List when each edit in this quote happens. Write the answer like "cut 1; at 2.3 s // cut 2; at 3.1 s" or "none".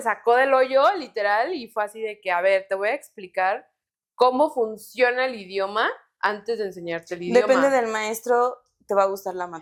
none